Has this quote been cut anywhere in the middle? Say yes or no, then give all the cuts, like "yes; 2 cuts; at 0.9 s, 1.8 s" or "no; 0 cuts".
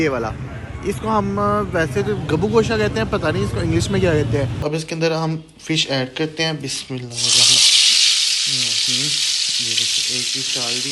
yes; 1 cut; at 4.6 s